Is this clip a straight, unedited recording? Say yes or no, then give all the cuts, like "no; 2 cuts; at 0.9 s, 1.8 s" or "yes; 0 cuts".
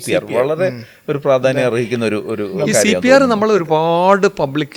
yes; 0 cuts